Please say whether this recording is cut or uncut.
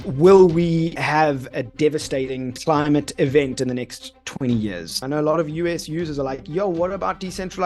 cut